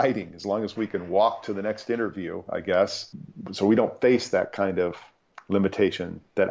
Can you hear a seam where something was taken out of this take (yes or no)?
yes